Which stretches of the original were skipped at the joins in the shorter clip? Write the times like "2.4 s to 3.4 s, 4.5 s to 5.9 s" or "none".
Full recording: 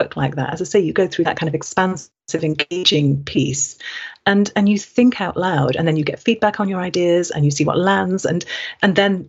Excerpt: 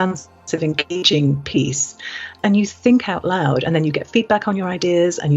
4.2 s to 4.5 s

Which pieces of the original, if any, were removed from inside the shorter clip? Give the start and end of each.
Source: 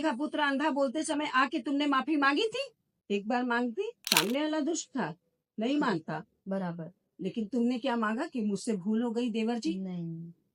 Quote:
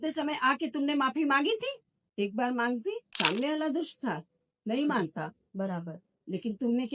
none

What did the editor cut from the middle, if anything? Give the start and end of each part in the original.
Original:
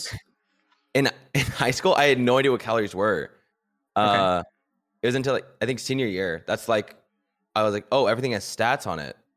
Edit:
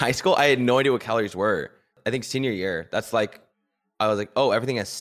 3.6 s to 5.5 s

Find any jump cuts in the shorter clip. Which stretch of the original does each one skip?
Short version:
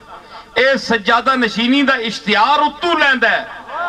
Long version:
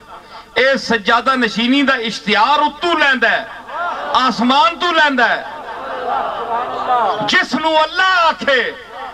none

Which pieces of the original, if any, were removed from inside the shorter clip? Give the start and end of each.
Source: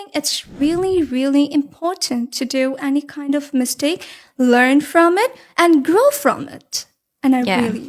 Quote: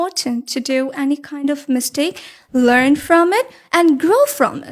none

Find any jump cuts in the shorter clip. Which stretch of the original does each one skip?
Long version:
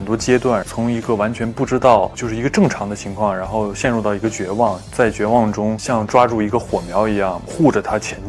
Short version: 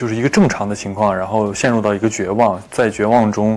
none

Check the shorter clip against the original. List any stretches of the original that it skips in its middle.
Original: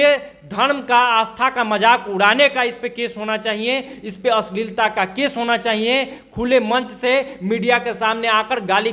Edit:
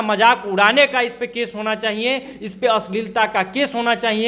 none

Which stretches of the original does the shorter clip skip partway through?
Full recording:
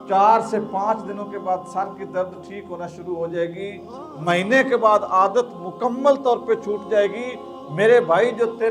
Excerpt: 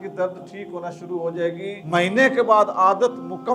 3.8 s to 4.1 s

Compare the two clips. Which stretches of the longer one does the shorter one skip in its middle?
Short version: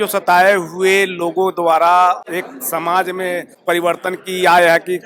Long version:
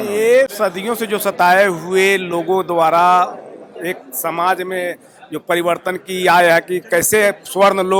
3.4 s to 3.8 s, 5.1 s to 5.4 s

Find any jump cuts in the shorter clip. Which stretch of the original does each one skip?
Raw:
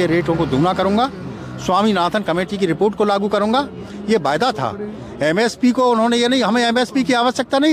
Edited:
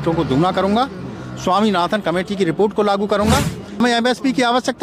4.0 s to 6.5 s

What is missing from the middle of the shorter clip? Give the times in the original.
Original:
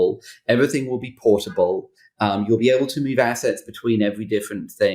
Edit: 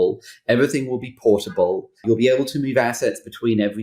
2.0 s to 2.4 s

